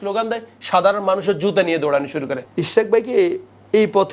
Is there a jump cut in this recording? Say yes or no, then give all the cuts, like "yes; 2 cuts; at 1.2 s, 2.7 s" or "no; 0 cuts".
yes; 1 cut; at 2.4 s